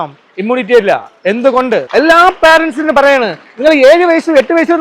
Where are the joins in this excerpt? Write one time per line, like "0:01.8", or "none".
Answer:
0:01.9